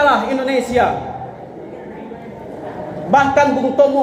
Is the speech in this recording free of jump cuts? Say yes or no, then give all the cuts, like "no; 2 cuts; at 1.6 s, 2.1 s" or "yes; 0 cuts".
yes; 0 cuts